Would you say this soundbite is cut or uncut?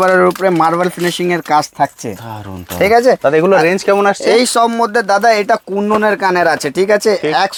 uncut